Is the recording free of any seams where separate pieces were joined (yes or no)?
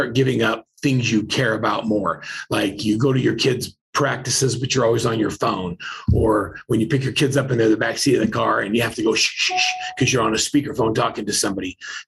yes